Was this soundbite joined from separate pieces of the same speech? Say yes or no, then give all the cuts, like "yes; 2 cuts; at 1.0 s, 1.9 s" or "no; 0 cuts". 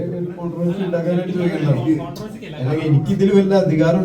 no; 0 cuts